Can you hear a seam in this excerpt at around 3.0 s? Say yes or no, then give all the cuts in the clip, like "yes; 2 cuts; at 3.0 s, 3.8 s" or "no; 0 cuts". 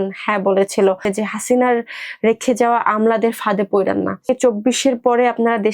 no; 2 cuts; at 1.1 s, 4.3 s